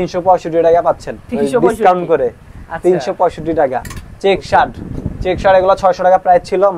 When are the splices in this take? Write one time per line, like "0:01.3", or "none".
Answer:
none